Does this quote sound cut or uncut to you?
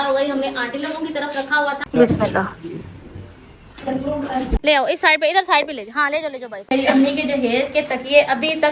cut